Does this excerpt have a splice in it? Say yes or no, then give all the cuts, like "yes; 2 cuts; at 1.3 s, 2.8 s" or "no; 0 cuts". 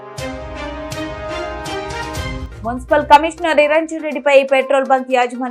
yes; 1 cut; at 2.4 s